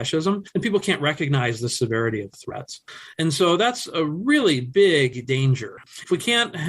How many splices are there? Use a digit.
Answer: 0